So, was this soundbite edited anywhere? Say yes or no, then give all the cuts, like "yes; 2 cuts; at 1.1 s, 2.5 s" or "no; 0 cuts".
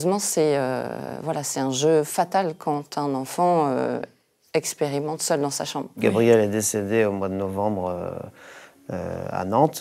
yes; 1 cut; at 6.0 s